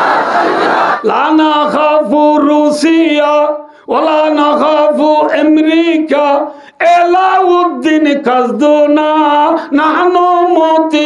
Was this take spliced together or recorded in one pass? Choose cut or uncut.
cut